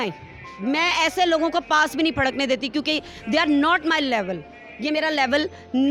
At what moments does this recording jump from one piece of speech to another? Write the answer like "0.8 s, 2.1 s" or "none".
none